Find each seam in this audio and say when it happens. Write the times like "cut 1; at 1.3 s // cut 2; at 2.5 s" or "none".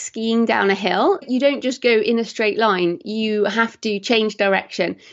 cut 1; at 1.3 s